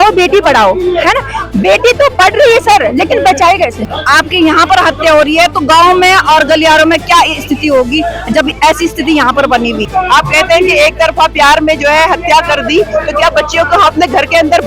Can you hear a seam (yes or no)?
yes